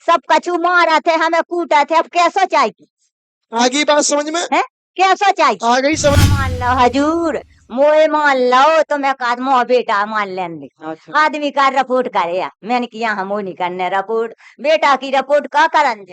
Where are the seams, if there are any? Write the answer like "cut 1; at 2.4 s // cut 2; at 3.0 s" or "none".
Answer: cut 1; at 6.2 s